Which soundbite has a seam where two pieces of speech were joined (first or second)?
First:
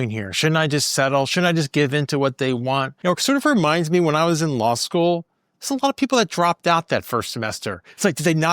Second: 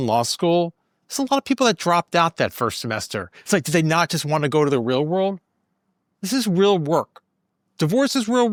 first